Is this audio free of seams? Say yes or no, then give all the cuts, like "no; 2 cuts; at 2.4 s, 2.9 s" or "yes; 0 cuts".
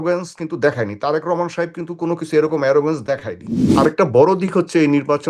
no; 1 cut; at 3.7 s